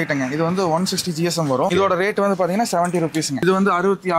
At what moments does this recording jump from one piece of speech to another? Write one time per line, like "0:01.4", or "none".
0:01.7
0:03.3

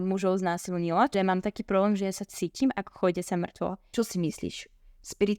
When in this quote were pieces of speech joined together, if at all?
0:01.1
0:03.8

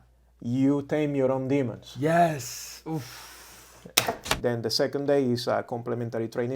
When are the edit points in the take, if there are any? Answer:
0:04.2

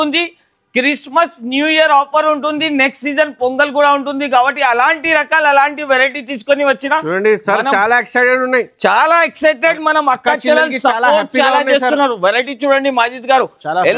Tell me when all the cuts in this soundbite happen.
none

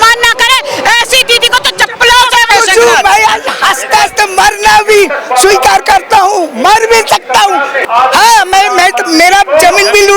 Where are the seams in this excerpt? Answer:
0:02.5
0:07.8

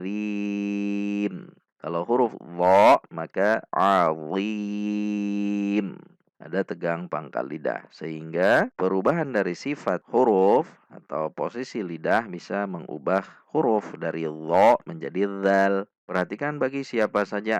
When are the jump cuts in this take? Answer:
0:16.0

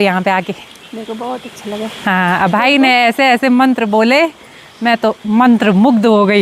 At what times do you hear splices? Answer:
none

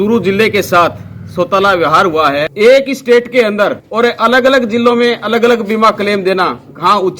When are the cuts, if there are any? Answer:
0:02.5

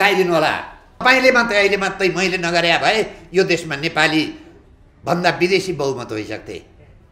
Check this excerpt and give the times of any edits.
0:01.0

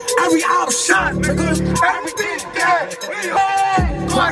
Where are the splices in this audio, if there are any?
none

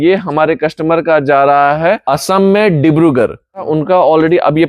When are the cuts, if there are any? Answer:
0:02.0
0:03.7

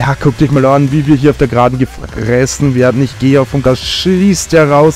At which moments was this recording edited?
0:03.6

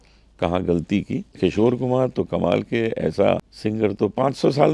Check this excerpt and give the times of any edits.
0:01.3
0:03.5

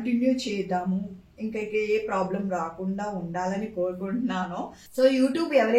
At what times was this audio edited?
0:04.8

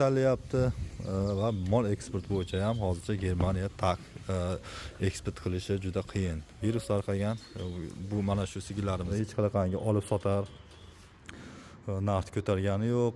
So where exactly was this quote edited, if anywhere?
0:09.1

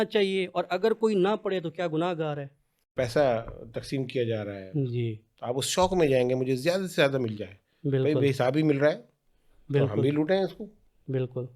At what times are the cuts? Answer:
0:02.9

